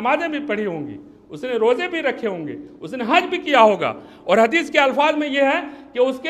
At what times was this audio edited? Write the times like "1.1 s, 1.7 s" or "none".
none